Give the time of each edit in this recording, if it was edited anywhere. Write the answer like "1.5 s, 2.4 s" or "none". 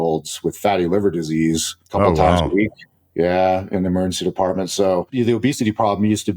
1.8 s, 5.1 s